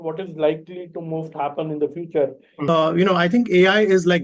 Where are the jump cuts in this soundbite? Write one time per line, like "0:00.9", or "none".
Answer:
0:02.7